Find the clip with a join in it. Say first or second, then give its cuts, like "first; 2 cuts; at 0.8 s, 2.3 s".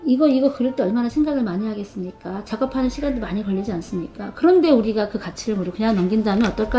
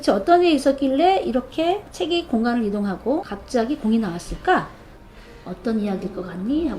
second; 1 cut; at 3.4 s